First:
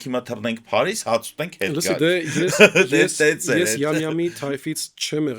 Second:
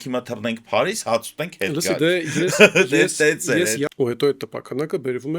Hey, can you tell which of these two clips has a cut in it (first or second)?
second